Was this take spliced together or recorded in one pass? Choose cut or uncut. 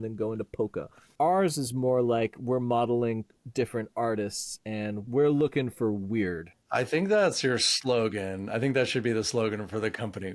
cut